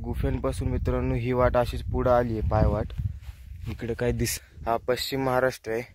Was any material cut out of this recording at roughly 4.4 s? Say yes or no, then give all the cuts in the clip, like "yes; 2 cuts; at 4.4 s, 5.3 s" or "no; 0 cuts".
yes; 1 cut; at 4.4 s